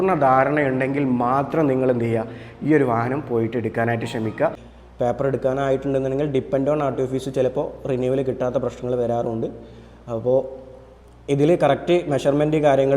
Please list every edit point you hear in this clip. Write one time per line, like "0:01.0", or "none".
0:04.7